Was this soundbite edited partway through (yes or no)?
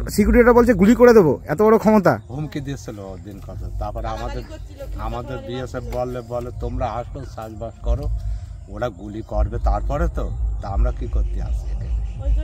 no